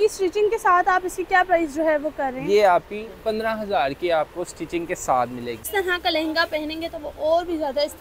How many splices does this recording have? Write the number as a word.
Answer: one